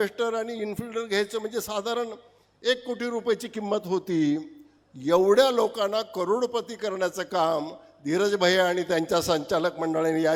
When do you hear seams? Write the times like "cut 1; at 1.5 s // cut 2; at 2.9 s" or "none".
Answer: none